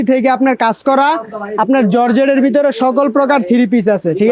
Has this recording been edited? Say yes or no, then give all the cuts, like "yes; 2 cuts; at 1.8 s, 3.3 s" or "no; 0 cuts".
no; 0 cuts